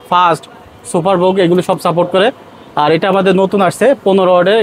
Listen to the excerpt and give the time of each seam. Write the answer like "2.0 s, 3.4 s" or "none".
none